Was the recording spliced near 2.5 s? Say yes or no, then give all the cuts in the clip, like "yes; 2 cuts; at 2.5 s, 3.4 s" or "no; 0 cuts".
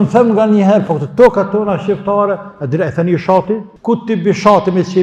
no; 1 cut; at 3.7 s